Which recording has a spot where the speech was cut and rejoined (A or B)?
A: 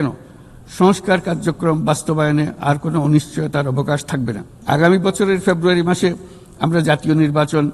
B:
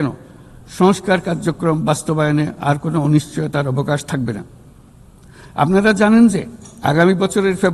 A